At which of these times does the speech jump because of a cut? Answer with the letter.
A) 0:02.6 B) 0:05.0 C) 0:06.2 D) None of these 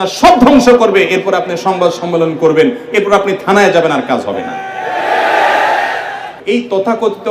C